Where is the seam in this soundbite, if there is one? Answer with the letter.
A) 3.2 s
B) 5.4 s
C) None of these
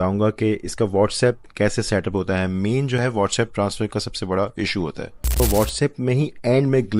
B